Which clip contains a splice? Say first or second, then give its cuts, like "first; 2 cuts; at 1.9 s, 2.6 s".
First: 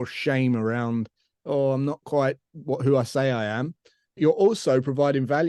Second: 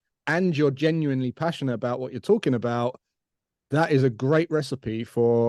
first; 1 cut; at 4.1 s